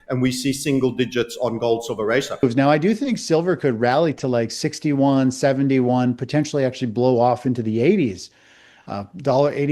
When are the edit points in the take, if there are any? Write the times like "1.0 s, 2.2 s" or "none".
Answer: 2.3 s